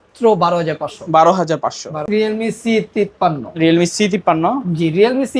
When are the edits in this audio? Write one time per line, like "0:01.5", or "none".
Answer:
0:02.0